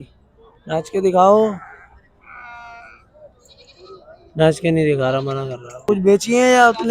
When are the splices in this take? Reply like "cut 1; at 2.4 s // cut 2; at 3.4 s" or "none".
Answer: cut 1; at 5.8 s